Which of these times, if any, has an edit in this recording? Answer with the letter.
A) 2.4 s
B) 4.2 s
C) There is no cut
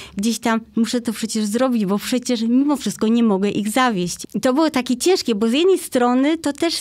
B